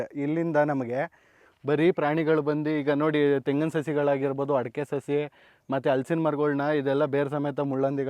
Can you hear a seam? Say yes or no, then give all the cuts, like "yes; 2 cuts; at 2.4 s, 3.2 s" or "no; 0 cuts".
no; 0 cuts